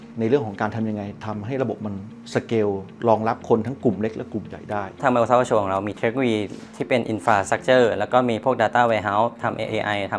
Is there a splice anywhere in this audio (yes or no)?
yes